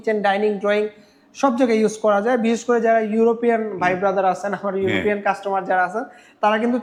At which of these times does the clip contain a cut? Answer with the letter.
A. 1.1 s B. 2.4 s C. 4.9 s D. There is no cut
D